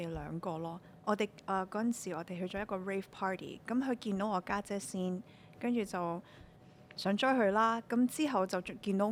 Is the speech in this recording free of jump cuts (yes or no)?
yes